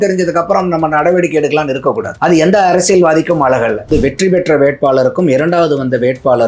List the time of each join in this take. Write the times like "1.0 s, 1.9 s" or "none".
2.1 s, 3.9 s